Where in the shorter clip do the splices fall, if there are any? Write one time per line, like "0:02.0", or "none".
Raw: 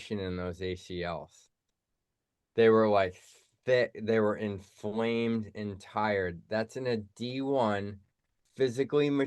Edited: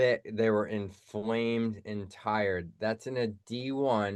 none